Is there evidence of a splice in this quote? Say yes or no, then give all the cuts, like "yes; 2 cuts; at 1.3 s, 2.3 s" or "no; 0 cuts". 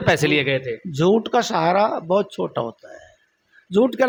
no; 0 cuts